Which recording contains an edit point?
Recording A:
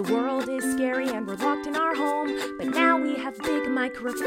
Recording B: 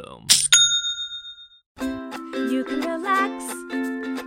B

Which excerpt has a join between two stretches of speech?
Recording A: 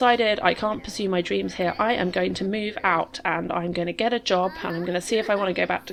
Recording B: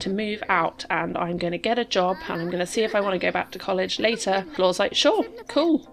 B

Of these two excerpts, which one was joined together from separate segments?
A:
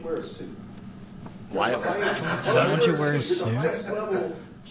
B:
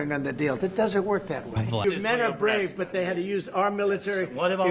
B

